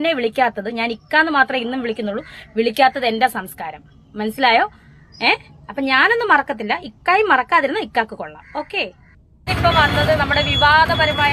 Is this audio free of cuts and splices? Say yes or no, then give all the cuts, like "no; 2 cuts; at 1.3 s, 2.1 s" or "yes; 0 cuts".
no; 1 cut; at 9.5 s